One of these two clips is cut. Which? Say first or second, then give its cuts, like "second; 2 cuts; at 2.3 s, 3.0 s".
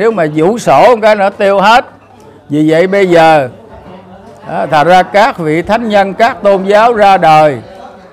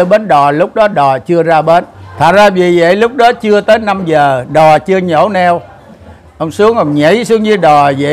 second; 1 cut; at 2.0 s